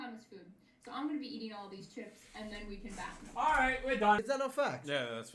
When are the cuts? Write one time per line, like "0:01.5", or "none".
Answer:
0:04.2